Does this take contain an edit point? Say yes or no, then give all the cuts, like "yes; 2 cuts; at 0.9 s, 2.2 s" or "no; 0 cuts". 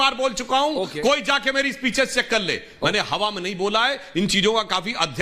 no; 0 cuts